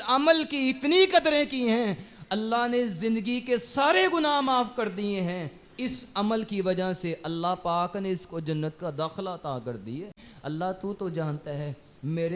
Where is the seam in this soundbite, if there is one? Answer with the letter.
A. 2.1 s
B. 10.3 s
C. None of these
B